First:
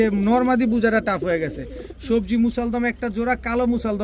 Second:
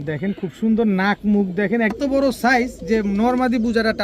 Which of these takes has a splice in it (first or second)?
second